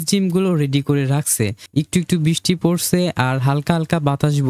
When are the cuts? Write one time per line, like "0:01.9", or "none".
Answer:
0:01.6